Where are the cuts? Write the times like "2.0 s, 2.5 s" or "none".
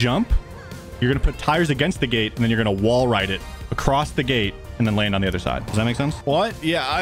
none